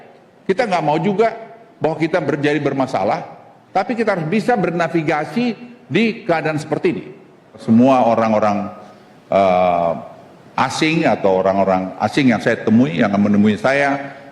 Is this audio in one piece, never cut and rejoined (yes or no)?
no